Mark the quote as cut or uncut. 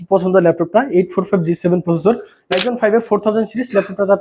cut